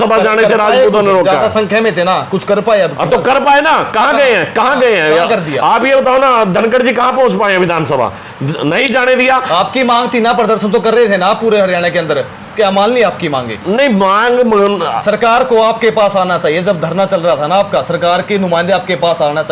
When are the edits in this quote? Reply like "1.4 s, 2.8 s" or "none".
none